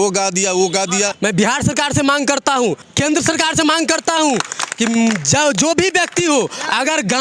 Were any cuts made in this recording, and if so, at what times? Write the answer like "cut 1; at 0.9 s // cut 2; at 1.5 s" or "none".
cut 1; at 1.1 s // cut 2; at 2.9 s